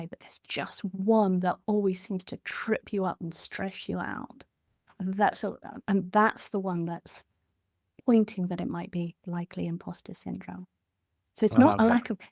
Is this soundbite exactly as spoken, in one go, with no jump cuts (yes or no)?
yes